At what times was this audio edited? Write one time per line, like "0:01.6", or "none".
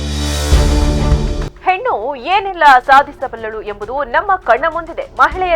0:01.3